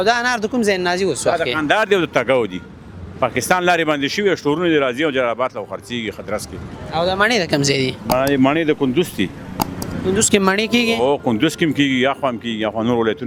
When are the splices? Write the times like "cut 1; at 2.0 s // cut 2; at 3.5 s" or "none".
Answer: none